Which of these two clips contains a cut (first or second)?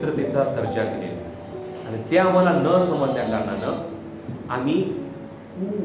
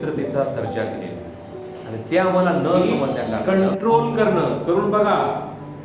second